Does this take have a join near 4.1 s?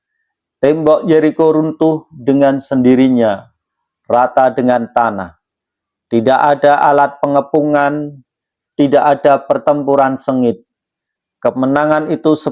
no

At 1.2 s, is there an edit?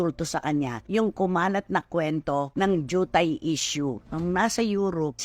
no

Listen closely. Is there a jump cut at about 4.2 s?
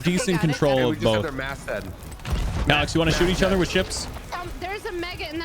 yes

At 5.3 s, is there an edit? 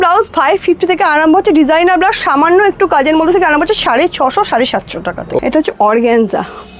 yes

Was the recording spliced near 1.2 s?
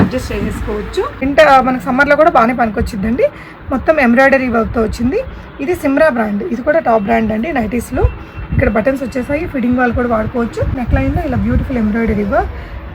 yes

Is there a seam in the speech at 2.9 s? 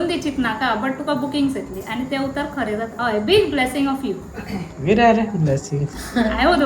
yes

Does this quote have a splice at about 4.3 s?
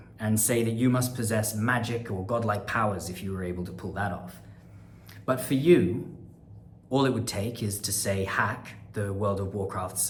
no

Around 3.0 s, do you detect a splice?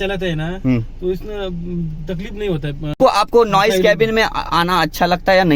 yes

